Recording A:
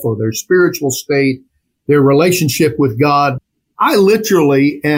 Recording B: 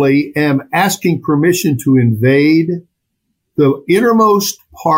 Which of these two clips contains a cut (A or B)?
A